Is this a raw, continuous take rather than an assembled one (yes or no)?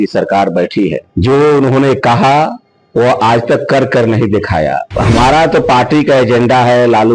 no